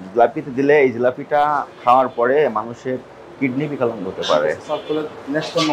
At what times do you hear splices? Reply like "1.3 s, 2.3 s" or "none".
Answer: none